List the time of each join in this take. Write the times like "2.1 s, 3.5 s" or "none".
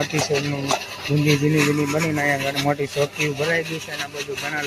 none

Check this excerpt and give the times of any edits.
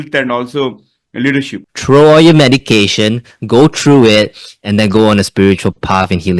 1.6 s

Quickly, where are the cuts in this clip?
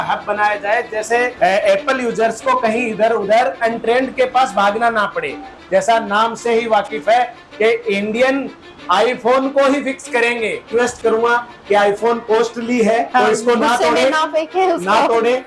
1.3 s, 5.5 s, 10.7 s, 13.1 s

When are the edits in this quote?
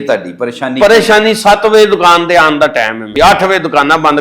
3.1 s

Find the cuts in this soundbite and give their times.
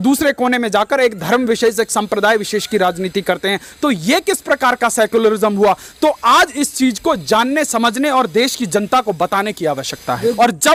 none

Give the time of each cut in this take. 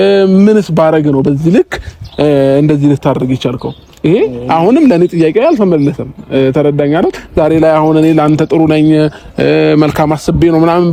none

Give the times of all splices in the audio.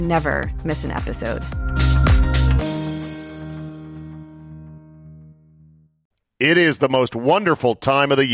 5.9 s

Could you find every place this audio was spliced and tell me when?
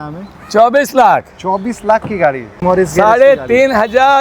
2.6 s

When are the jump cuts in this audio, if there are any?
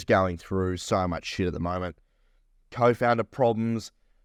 none

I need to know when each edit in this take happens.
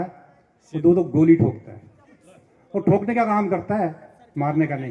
none

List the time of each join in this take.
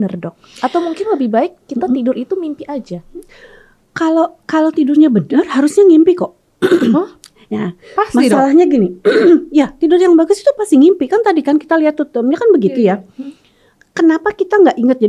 none

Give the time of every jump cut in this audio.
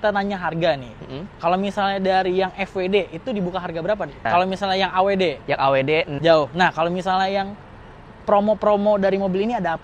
4.3 s, 6.1 s

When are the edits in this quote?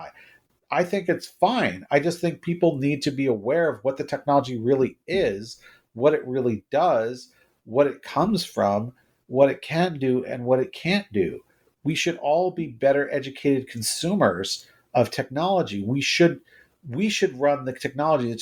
none

